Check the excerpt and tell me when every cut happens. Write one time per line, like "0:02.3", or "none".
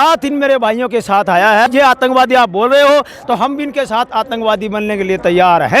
0:01.7